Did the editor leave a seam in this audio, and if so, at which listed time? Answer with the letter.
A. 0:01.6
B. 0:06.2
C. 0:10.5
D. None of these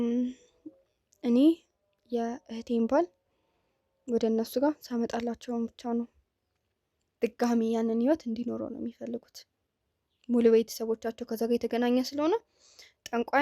B